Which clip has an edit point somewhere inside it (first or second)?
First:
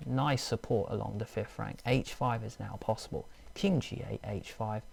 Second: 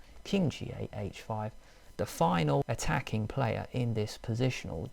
second